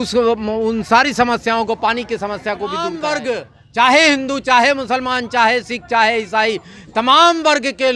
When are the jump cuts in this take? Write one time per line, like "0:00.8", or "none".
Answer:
0:03.0

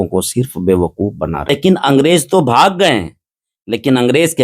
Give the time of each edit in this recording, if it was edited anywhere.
0:01.5

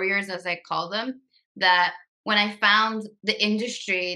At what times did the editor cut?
0:03.1

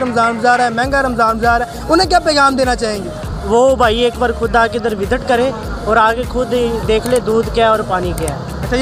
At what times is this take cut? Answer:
none

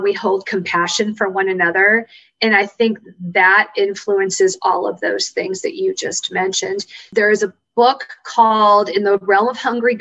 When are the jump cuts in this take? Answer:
0:07.0

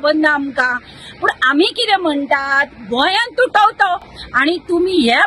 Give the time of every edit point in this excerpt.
none

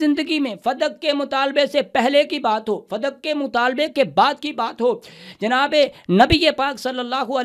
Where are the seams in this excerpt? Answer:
none

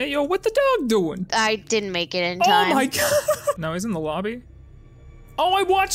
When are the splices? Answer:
0:01.2
0:03.6

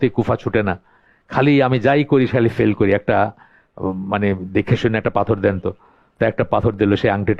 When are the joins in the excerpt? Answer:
none

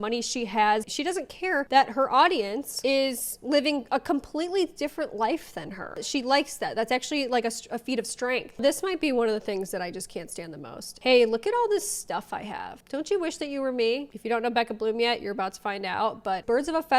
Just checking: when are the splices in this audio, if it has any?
0:08.5
0:11.0
0:14.1

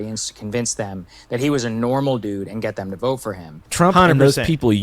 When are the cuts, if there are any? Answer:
0:03.5

